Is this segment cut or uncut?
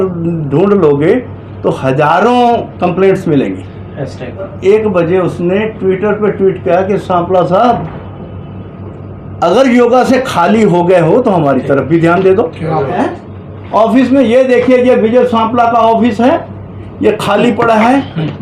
cut